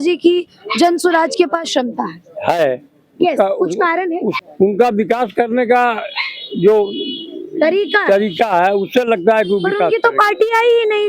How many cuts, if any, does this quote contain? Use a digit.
1